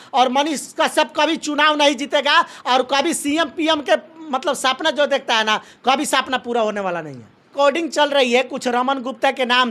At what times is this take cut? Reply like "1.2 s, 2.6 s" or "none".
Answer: 7.5 s